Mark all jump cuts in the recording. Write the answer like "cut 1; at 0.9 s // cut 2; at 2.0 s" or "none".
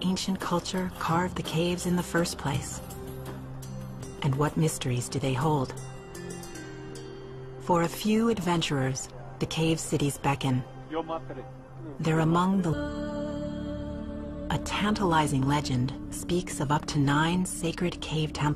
cut 1; at 12.7 s